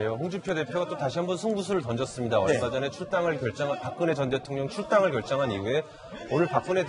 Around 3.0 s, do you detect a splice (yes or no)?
no